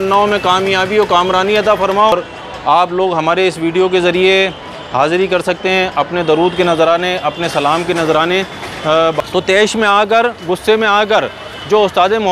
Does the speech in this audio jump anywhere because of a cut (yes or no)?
yes